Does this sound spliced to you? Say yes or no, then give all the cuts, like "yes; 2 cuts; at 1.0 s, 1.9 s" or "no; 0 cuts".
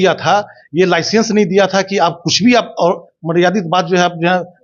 no; 0 cuts